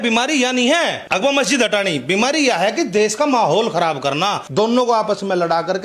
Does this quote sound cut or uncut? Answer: cut